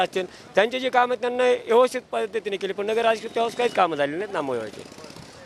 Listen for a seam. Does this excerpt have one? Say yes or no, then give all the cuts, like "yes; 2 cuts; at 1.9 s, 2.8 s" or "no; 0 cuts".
no; 0 cuts